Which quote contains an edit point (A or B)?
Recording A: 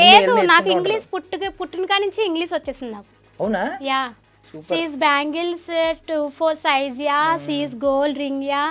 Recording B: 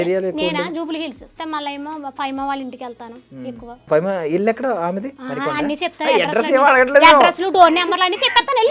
B